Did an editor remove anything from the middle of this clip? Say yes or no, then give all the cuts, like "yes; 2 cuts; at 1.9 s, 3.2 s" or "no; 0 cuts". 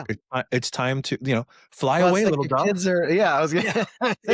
no; 0 cuts